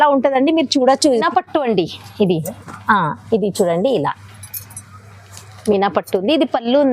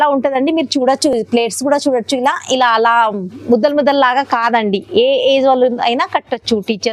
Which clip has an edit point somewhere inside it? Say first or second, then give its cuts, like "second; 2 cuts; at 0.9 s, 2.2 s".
first; 1 cut; at 1.2 s